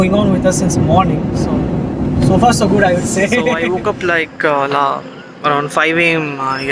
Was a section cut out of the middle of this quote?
yes; 1 cut; at 3.6 s

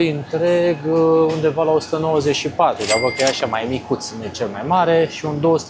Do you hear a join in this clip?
no; 0 cuts

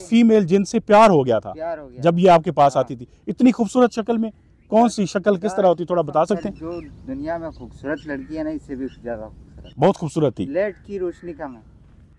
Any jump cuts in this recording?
no; 0 cuts

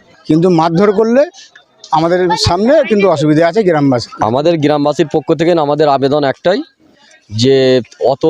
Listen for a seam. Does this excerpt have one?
yes; 1 cut; at 4.1 s

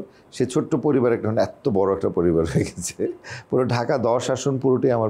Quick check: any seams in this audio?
no; 0 cuts

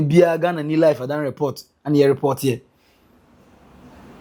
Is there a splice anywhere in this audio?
no; 0 cuts

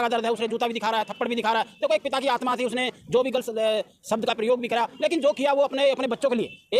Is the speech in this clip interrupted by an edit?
no; 0 cuts

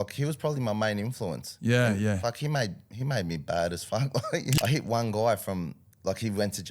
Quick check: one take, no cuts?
no; 1 cut; at 4.6 s

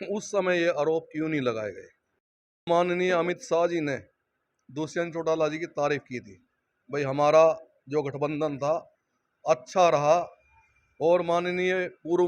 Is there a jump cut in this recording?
yes; 1 cut; at 2.7 s

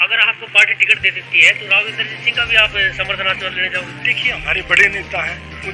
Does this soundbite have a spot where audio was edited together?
no; 0 cuts

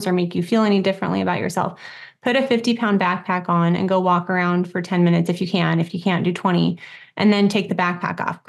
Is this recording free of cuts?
yes; 0 cuts

